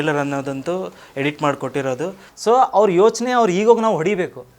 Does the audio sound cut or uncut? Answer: cut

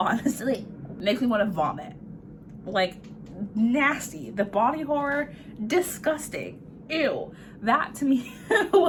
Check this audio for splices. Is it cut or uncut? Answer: uncut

